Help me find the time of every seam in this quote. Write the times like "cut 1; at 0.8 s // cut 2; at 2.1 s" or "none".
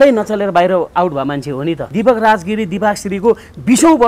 cut 1; at 1.9 s